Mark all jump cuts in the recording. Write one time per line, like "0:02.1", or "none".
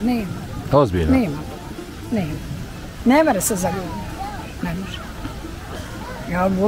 none